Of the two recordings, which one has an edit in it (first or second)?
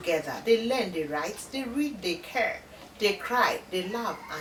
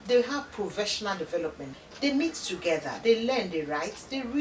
second